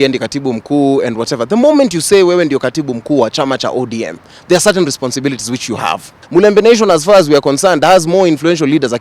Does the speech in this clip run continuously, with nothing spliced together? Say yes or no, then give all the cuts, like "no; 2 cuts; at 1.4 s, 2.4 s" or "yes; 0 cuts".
no; 1 cut; at 6.2 s